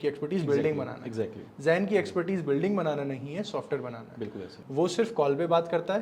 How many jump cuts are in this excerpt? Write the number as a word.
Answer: one